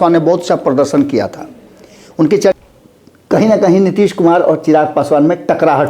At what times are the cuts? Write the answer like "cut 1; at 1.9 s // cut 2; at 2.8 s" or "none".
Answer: cut 1; at 2.6 s